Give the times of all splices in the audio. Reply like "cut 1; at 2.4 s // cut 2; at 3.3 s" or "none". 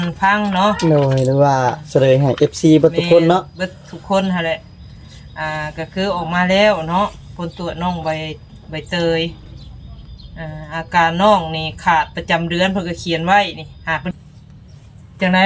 cut 1; at 14.1 s